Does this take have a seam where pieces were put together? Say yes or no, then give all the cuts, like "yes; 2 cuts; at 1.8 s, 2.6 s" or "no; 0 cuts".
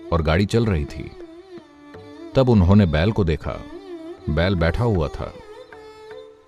no; 0 cuts